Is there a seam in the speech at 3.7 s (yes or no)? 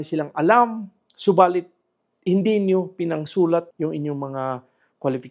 yes